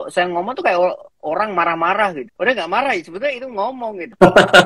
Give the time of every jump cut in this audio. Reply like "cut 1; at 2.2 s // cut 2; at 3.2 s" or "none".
none